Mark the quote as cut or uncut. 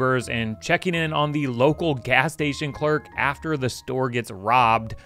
uncut